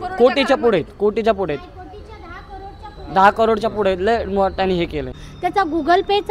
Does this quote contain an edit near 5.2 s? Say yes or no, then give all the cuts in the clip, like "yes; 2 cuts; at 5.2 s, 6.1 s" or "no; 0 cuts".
yes; 1 cut; at 5.2 s